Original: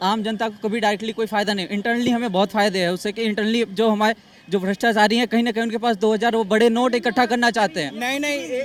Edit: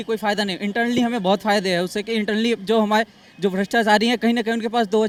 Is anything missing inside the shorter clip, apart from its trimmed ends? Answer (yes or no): no